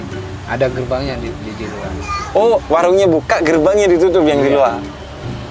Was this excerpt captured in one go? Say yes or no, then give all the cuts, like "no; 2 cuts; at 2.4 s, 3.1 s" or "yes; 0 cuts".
yes; 0 cuts